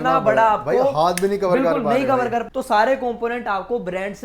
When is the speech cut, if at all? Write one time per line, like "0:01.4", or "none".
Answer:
0:02.5